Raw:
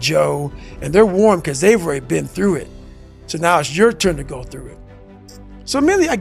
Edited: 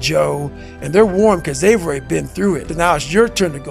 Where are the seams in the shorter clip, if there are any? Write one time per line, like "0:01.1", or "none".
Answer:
0:02.7